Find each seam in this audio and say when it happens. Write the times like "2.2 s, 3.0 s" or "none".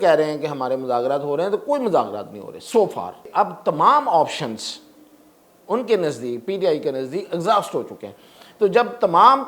3.3 s